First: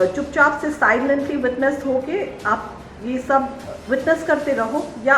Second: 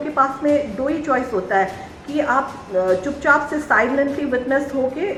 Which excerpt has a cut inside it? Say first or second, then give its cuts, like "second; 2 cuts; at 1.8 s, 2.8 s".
first; 1 cut; at 3.7 s